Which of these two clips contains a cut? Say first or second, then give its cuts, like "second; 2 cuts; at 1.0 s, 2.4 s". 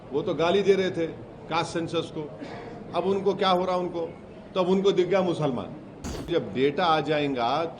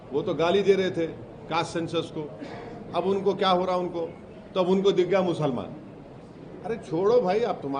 first; 1 cut; at 6.3 s